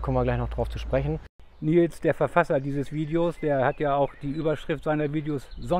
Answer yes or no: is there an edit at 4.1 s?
no